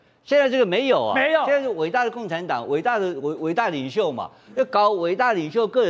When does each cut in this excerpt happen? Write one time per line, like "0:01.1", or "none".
none